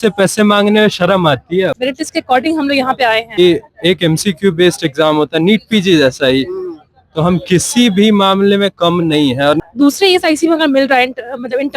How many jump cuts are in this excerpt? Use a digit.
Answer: 3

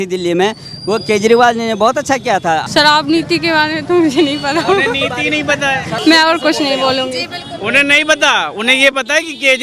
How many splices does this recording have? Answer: 2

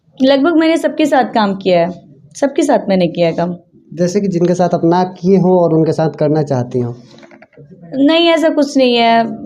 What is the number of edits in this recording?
0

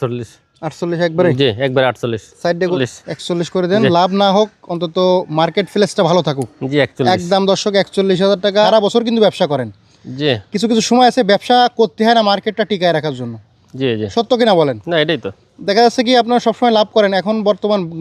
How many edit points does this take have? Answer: 2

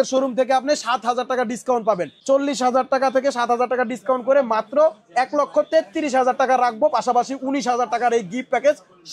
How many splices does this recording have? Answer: 0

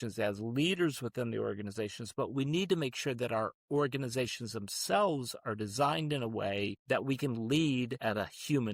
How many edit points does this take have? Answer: 2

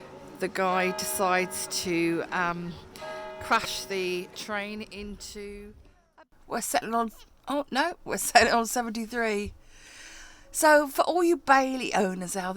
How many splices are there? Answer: 1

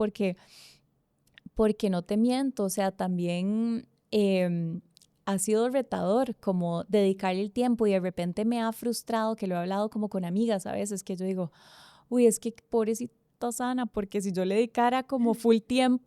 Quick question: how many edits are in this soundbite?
0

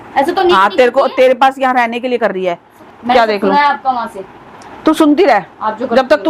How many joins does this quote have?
1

